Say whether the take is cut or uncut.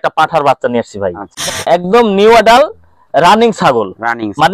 cut